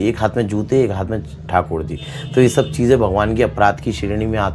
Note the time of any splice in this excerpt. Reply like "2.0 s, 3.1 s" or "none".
none